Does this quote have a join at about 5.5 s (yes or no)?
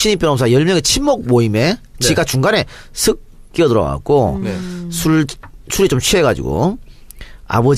no